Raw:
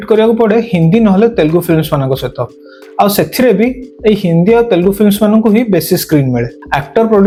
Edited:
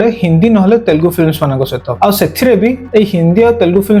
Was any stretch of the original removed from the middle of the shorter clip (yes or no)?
yes